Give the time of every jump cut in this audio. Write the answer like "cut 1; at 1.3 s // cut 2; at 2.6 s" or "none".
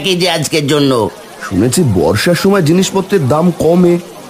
cut 1; at 1.2 s